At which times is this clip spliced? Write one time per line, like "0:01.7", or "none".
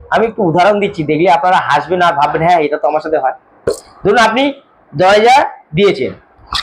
none